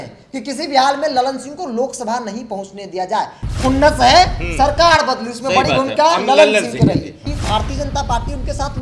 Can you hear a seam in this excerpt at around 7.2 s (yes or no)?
yes